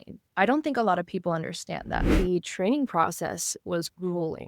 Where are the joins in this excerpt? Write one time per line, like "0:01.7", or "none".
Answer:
0:02.1

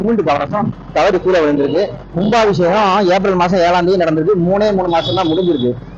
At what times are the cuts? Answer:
0:02.0

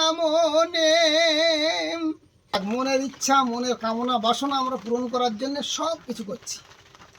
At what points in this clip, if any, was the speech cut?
0:02.6

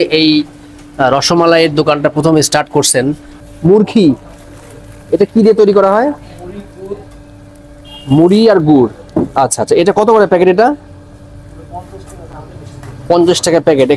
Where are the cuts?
0:03.3

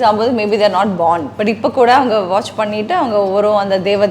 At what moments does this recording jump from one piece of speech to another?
0:01.3

